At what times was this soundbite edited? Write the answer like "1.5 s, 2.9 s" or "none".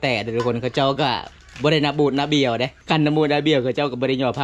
2.7 s